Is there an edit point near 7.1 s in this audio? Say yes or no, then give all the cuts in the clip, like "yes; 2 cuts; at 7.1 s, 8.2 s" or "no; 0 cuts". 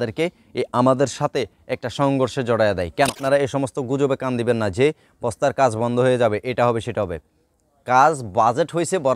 no; 1 cut; at 3.2 s